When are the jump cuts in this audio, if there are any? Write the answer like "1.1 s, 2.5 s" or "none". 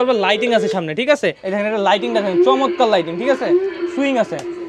1.4 s